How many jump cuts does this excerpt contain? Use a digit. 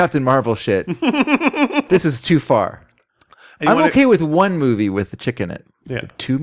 1